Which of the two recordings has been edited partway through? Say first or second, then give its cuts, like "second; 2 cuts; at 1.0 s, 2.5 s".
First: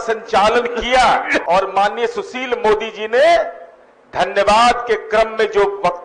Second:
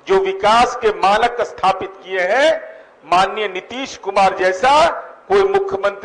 first; 1 cut; at 1.4 s